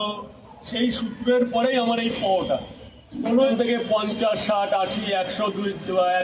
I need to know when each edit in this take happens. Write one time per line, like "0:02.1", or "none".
0:03.5